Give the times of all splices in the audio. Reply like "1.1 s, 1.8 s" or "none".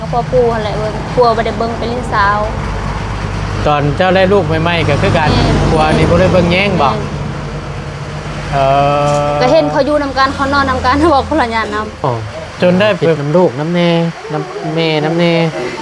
13.2 s